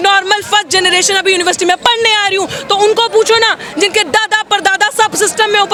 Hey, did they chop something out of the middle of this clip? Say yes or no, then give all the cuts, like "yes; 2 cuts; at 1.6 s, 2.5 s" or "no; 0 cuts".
no; 0 cuts